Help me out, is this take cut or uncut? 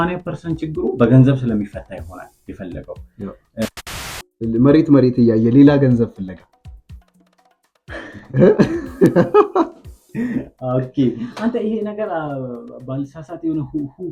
cut